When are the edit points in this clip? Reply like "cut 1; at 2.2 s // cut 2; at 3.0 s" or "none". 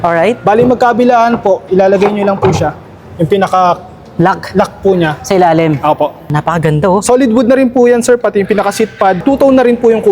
cut 1; at 6.3 s // cut 2; at 9.2 s